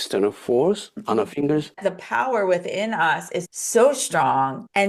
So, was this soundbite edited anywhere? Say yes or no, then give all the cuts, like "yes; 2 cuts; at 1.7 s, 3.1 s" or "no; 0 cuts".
yes; 1 cut; at 1.8 s